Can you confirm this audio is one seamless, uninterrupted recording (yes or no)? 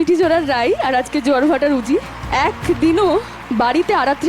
no